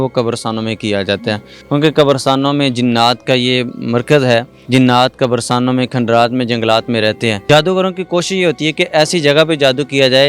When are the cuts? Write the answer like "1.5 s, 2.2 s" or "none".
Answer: 1.5 s, 4.6 s, 7.4 s